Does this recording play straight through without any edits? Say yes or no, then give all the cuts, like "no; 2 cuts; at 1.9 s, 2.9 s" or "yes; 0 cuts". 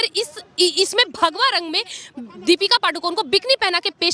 yes; 0 cuts